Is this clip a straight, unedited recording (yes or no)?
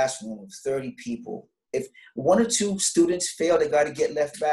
no